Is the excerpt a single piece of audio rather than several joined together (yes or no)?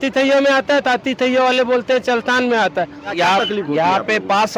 no